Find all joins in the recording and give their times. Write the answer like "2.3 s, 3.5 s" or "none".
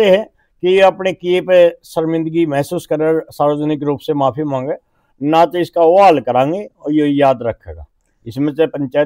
none